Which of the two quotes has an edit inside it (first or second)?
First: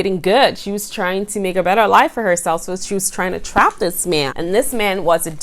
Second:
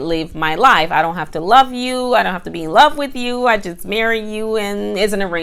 first